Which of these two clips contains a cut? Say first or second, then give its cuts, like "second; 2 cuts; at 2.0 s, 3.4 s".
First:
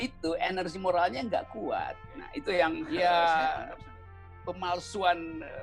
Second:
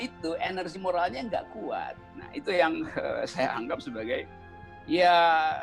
first; 1 cut; at 2.8 s